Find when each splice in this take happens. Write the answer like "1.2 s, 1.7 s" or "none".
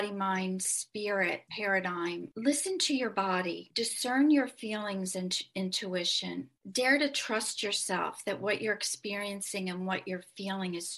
none